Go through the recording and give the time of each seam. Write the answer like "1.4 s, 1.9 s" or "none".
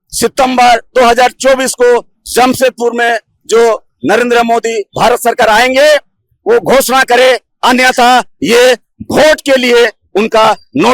none